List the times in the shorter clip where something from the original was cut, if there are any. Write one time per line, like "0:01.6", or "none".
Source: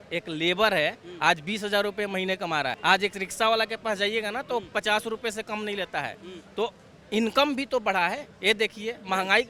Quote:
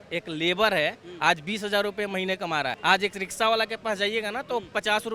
none